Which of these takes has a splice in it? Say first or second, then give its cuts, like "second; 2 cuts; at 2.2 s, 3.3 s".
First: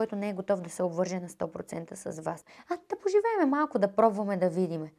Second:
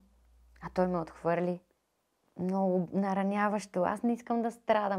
first; 1 cut; at 2.5 s